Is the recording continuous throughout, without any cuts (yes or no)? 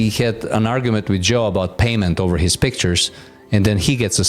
yes